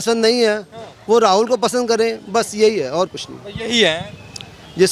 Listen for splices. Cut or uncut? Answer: uncut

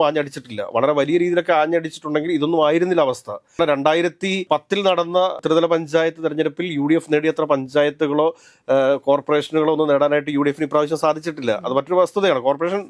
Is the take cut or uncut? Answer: uncut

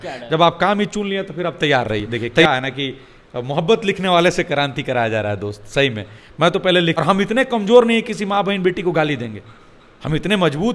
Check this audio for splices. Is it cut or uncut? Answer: cut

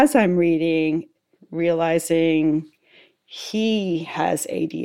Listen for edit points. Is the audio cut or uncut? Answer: cut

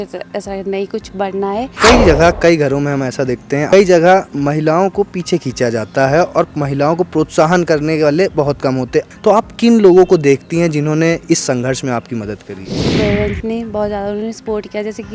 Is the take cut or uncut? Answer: cut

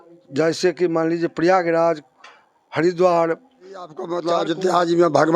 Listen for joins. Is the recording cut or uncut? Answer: cut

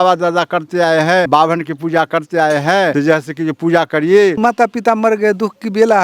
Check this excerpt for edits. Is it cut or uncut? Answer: cut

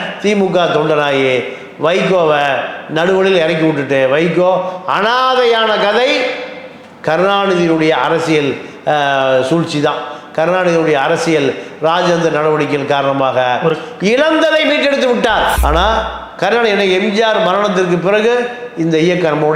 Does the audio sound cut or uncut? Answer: cut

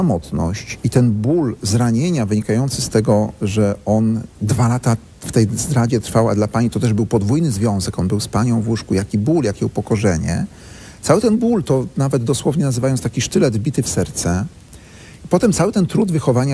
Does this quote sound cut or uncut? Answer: uncut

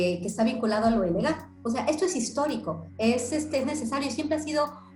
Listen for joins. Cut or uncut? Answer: uncut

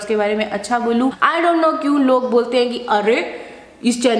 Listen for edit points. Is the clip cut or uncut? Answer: cut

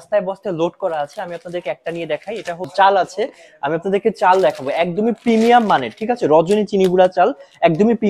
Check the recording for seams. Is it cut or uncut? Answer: cut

